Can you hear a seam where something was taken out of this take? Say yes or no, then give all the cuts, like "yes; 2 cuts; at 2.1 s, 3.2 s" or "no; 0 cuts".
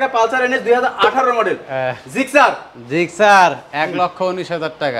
no; 0 cuts